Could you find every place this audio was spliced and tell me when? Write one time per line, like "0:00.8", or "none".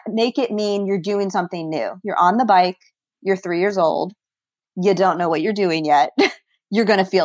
none